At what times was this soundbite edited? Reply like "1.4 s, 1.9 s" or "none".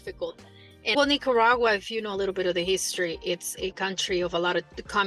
0.9 s